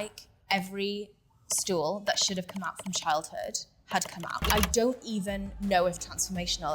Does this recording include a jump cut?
yes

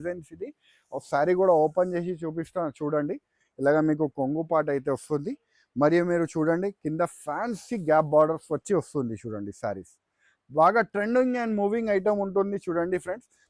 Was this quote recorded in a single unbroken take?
yes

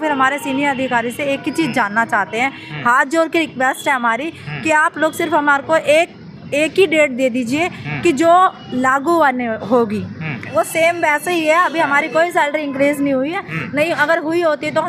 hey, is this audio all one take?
no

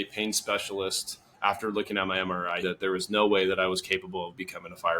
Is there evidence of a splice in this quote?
yes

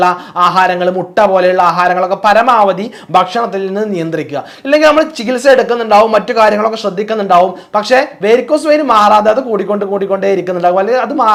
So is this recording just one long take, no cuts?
yes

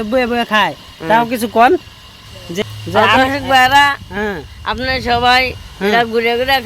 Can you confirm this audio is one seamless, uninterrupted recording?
no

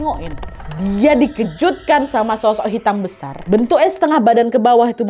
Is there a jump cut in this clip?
no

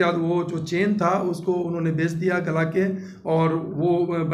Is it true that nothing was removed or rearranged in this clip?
yes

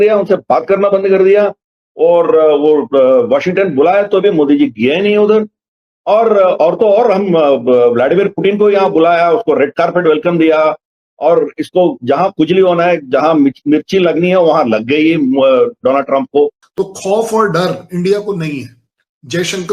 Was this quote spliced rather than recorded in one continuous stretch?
yes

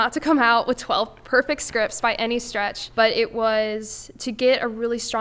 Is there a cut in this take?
yes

